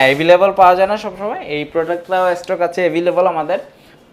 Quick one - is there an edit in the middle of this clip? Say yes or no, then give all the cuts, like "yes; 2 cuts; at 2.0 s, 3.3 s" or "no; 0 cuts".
no; 0 cuts